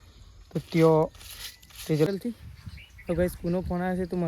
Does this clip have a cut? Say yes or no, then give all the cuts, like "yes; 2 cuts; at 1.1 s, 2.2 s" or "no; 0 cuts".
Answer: yes; 1 cut; at 2.1 s